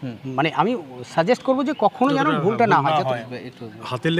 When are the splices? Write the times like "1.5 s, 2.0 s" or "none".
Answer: 3.3 s